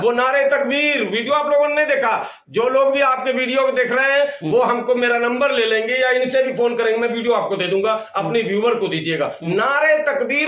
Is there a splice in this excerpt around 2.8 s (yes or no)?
no